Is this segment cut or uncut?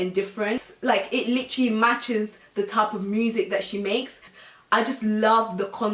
uncut